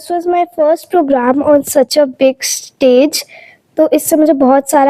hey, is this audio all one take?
yes; 0 cuts

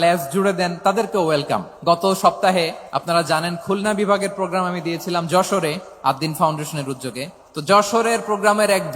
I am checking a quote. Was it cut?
yes; 4 cuts; at 1.7 s, 2.9 s, 5.9 s, 7.4 s

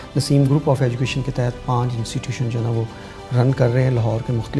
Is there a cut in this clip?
no; 0 cuts

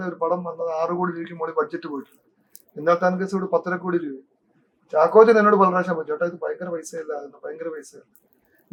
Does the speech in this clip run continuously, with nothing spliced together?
yes; 0 cuts

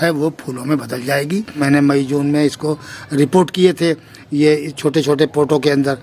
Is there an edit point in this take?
yes; 1 cut; at 1.6 s

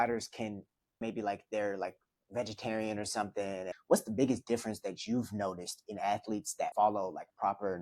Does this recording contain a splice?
yes; 3 cuts; at 1.0 s, 3.7 s, 6.7 s

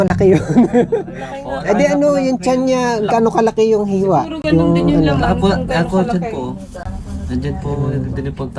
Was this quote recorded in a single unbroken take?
yes; 0 cuts

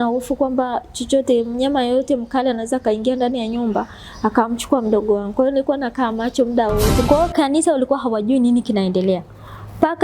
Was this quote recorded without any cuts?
no; 1 cut; at 7.1 s

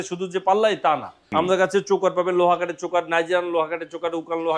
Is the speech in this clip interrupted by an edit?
yes; 1 cut; at 1.2 s

